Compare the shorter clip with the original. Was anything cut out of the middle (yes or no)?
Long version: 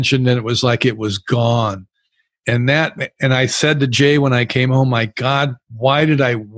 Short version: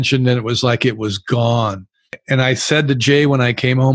yes